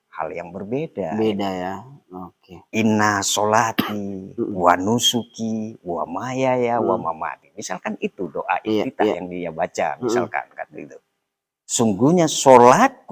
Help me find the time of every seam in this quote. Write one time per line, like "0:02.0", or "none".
none